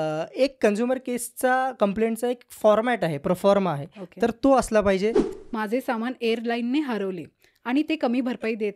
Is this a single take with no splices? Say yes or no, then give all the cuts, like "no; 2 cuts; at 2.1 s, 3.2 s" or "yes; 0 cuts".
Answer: no; 1 cut; at 5.2 s